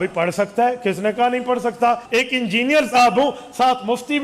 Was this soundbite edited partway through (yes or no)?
yes